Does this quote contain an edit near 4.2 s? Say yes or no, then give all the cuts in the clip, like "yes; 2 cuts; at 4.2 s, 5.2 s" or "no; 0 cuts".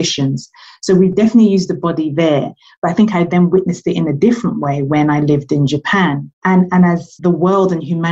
no; 2 cuts; at 6.3 s, 7.1 s